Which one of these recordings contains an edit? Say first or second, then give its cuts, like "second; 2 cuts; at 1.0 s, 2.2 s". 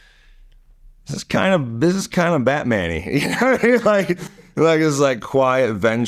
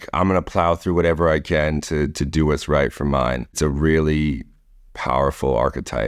second; 1 cut; at 3.5 s